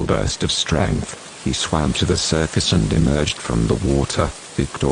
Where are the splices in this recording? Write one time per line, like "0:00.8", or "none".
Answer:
0:01.5

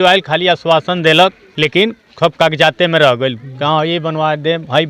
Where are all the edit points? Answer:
0:01.4

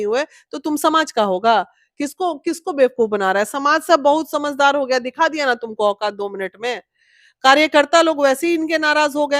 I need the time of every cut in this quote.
none

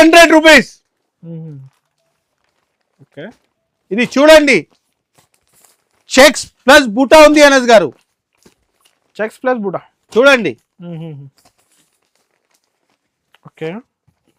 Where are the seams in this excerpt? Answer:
none

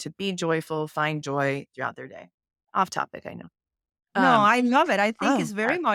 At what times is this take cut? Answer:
none

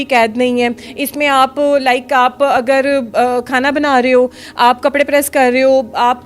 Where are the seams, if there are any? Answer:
none

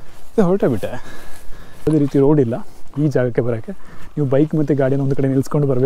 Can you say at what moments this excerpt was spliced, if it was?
0:01.9

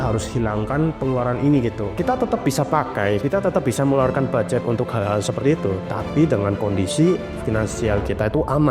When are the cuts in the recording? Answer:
0:01.8
0:03.2

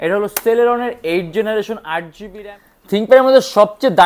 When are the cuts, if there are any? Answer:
0:02.2

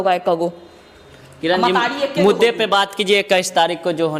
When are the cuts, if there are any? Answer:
none

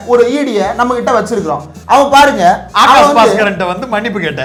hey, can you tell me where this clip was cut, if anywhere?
none

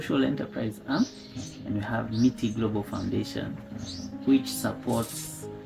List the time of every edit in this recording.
none

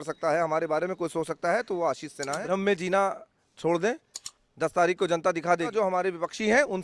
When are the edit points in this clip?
0:02.4
0:05.7

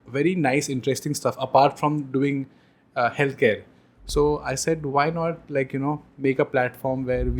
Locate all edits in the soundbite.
none

